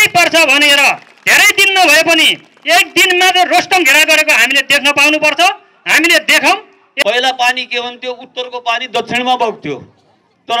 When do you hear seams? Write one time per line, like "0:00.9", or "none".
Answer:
0:06.8